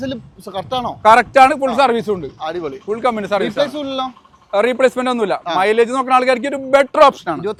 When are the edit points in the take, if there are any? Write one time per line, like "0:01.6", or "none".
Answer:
none

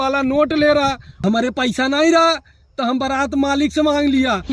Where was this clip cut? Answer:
0:01.1

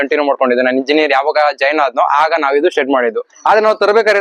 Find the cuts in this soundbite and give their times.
0:03.3

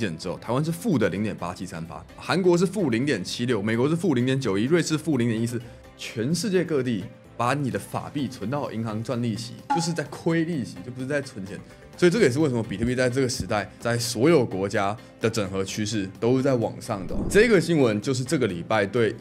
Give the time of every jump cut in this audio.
0:02.2
0:13.7
0:17.2

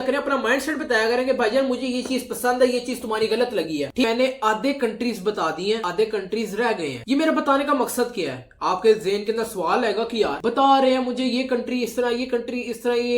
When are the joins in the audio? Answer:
0:04.0

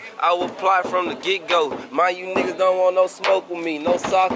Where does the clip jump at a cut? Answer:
none

